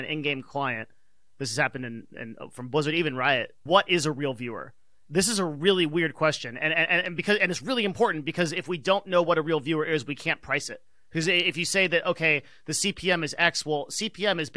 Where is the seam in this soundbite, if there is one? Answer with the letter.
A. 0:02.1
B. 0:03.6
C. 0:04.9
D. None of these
B